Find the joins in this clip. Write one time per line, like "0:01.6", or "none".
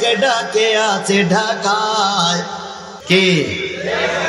0:02.9